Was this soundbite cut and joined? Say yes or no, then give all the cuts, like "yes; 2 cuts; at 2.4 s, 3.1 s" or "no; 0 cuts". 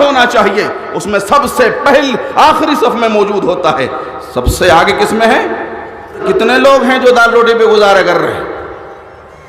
yes; 1 cut; at 6.2 s